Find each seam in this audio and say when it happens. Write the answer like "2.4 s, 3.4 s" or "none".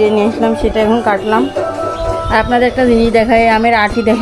none